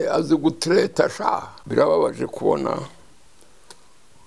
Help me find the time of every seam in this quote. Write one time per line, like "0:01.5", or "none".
0:01.6